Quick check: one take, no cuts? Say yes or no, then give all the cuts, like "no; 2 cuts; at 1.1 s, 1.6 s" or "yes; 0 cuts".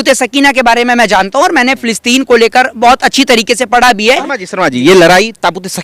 no; 1 cut; at 4.3 s